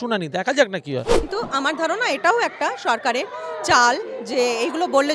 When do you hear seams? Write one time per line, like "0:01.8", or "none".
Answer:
0:01.3